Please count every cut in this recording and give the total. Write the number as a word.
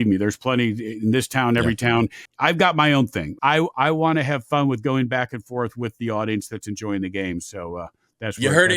two